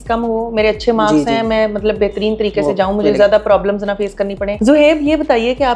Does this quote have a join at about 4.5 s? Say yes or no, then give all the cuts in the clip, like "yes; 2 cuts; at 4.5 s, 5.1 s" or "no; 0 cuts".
yes; 1 cut; at 4.5 s